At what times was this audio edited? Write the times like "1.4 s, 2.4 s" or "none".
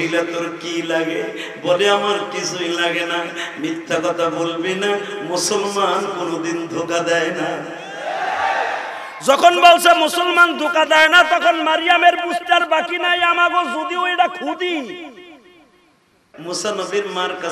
16.3 s